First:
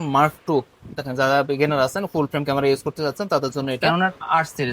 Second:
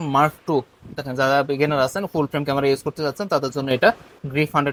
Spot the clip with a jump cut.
first; 1 cut; at 3.8 s

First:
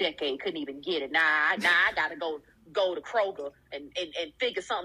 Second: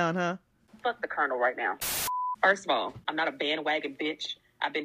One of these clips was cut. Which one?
second; 2 cuts; at 1.8 s, 3.0 s

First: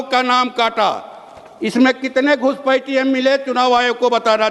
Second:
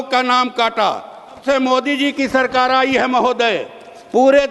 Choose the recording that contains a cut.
second; 1 cut; at 1.4 s

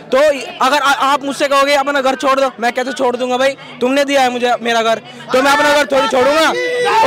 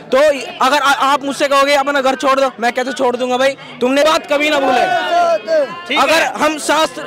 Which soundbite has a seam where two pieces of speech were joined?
second; 1 cut; at 4.0 s

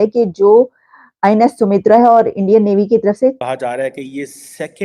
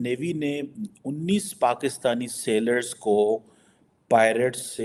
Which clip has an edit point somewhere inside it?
first; 1 cut; at 3.4 s

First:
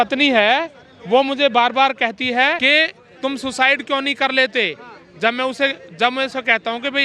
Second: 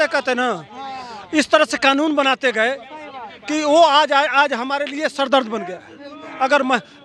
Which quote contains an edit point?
first; 1 cut; at 2.6 s

